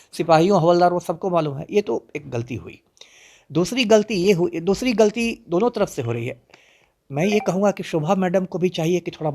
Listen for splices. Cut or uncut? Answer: uncut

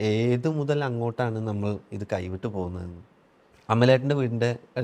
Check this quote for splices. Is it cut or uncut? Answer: cut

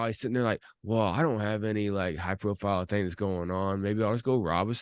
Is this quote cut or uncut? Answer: uncut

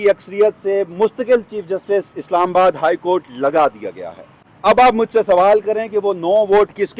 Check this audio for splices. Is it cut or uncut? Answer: cut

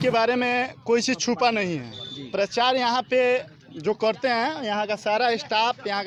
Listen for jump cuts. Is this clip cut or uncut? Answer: uncut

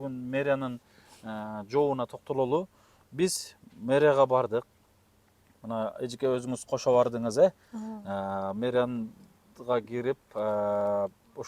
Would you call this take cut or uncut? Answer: uncut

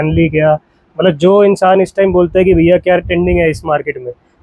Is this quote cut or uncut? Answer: uncut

